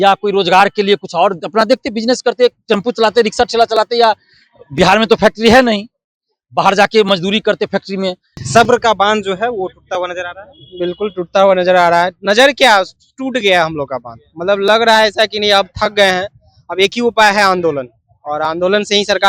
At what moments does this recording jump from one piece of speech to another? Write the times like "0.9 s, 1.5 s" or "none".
8.3 s